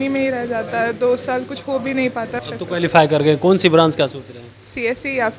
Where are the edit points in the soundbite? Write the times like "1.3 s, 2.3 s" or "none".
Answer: 2.4 s